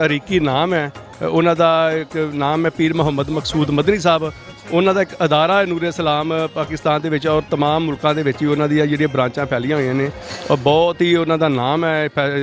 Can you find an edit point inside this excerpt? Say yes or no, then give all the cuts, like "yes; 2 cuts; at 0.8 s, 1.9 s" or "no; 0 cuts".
no; 0 cuts